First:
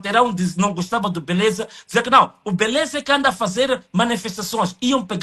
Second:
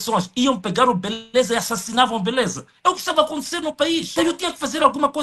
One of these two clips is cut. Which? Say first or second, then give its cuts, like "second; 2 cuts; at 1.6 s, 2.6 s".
second; 1 cut; at 4.1 s